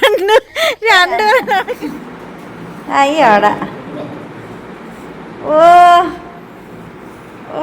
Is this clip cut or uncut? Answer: cut